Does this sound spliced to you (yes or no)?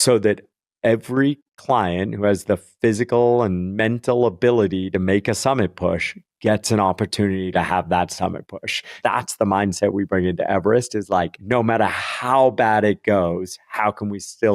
yes